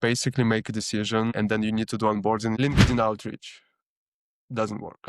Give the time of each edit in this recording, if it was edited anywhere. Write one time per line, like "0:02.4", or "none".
0:01.3
0:02.6